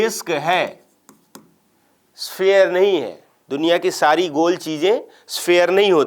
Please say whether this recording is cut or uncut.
uncut